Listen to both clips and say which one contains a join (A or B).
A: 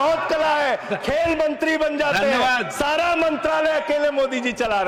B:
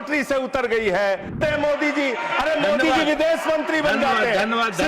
B